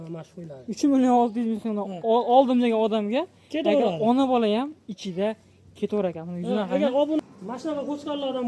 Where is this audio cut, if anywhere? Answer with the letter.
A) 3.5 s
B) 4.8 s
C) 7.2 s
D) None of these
C